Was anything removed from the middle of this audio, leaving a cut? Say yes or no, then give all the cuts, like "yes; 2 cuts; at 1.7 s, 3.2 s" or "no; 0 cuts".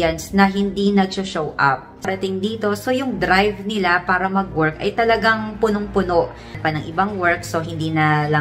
yes; 2 cuts; at 2.1 s, 6.5 s